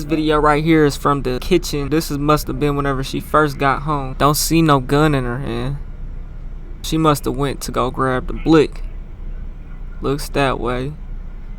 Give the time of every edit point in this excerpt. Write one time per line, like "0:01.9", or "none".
0:01.6
0:04.1
0:06.9